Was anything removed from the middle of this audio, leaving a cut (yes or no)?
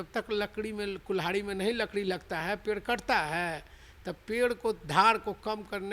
no